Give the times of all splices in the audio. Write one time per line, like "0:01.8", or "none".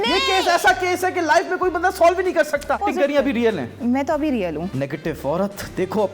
0:02.8
0:04.7